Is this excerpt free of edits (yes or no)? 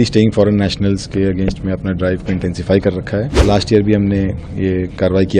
no